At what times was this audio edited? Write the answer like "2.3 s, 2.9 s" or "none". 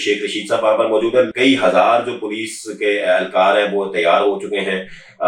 1.3 s